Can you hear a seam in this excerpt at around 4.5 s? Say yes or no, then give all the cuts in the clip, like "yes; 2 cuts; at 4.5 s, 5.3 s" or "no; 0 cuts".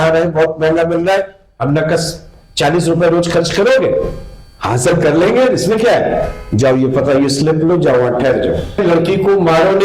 no; 1 cut; at 8.8 s